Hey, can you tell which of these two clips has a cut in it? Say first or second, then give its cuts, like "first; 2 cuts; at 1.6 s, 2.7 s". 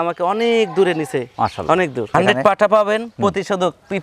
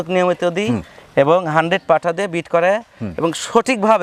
first; 1 cut; at 2.1 s